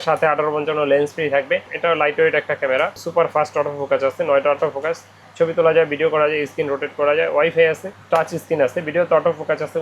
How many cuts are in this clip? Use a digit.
2